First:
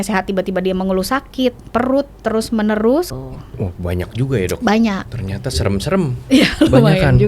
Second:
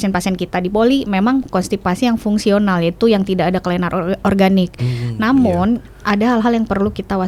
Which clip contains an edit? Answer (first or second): first